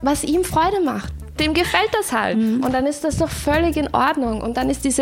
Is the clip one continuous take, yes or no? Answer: no